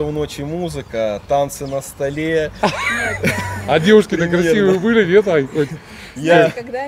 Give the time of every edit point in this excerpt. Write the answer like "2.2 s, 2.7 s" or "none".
none